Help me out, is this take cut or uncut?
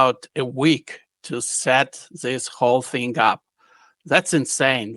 uncut